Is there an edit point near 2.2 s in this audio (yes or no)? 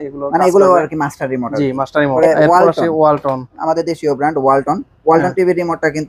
yes